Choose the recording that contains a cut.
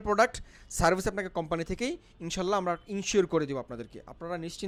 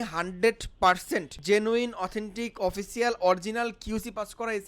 second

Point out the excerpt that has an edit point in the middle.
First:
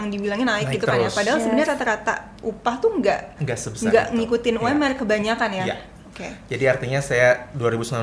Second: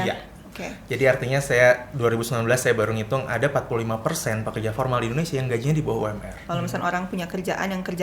second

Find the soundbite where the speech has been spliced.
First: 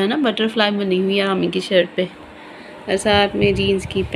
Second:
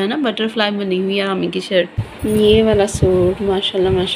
second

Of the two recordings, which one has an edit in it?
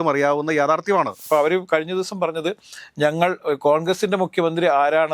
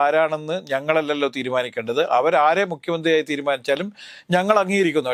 first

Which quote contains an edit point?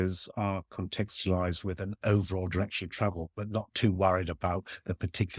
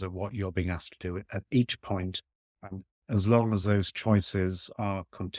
second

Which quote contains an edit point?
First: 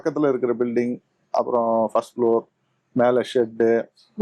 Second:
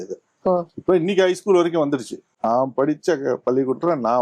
second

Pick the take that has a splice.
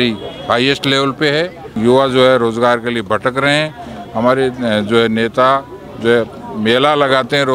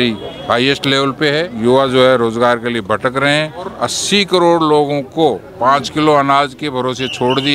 second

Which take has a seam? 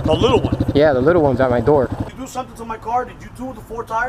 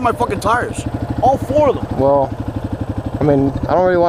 first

